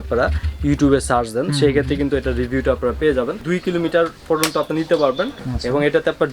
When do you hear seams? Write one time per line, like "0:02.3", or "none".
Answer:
0:03.4
0:05.4